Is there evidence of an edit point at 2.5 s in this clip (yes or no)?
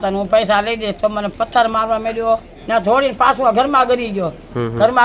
yes